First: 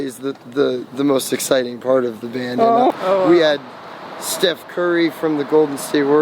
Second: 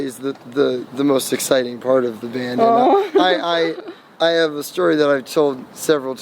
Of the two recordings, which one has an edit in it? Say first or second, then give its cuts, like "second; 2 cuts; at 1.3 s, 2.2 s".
first; 1 cut; at 2.9 s